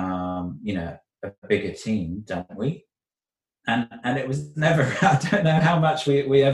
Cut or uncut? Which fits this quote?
uncut